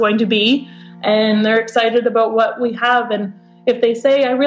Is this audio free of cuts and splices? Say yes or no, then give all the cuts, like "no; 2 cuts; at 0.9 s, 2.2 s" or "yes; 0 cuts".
no; 1 cut; at 1.4 s